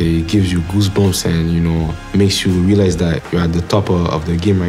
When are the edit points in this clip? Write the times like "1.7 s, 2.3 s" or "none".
2.0 s